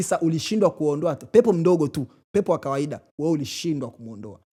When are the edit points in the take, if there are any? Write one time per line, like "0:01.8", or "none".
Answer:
none